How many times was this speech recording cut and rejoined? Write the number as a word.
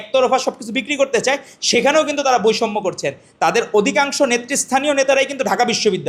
zero